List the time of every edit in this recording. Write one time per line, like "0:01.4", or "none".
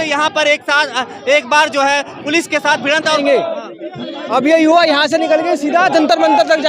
0:03.2